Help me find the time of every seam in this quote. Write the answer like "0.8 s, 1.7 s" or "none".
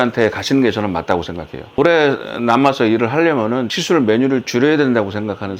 1.7 s, 3.7 s